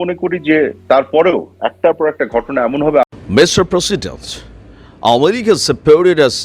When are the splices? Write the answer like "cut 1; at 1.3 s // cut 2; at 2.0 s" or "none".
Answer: cut 1; at 3.0 s